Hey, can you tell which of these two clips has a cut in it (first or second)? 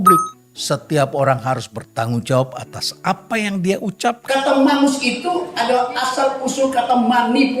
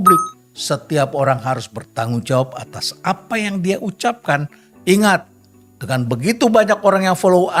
first